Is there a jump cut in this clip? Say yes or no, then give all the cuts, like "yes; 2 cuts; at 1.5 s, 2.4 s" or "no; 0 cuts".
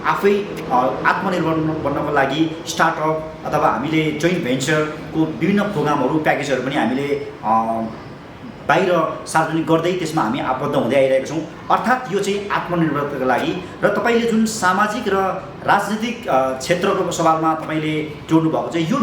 no; 0 cuts